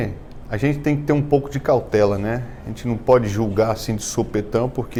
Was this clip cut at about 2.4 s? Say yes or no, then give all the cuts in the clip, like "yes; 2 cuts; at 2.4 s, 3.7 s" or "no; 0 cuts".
no; 0 cuts